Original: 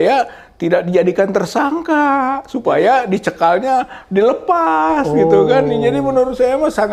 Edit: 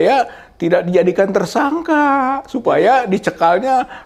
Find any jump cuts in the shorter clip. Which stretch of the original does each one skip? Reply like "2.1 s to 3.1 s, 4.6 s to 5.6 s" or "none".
none